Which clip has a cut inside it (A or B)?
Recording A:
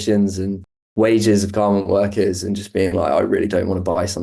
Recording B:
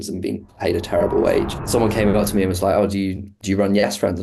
B